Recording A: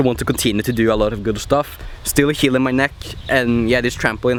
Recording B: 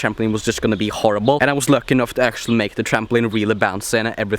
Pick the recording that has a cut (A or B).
B